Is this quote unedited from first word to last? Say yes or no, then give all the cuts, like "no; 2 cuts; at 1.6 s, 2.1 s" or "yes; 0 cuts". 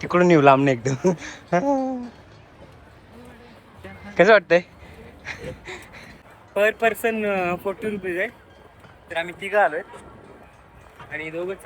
no; 1 cut; at 6.1 s